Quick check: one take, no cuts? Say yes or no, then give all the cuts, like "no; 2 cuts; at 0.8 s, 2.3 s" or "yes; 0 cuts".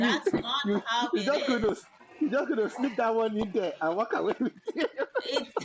yes; 0 cuts